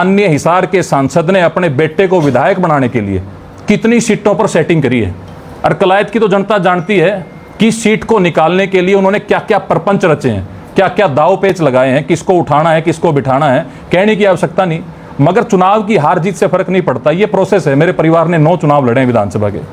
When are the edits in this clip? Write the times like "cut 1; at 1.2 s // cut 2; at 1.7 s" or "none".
none